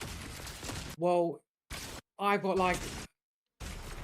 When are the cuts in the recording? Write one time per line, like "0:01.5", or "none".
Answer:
0:00.9